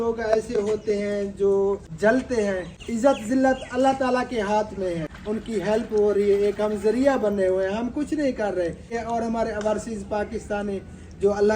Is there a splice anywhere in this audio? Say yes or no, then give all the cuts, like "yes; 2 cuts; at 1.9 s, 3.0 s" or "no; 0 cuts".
yes; 4 cuts; at 1.9 s, 2.8 s, 5.1 s, 9.0 s